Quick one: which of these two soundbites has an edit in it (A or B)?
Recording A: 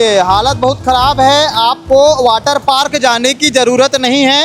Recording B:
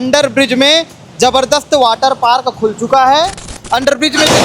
B